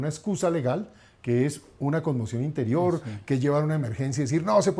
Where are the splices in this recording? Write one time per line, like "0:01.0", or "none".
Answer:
none